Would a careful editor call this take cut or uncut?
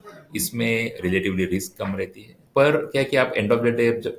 cut